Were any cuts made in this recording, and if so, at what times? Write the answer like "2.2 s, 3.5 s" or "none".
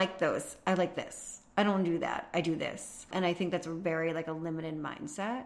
3.1 s